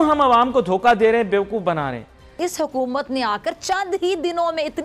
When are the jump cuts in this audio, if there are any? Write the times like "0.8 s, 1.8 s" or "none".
2.2 s